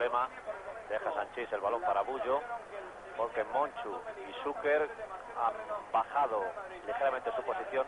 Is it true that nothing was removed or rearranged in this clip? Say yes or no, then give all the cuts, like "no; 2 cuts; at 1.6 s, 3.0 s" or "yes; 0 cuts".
yes; 0 cuts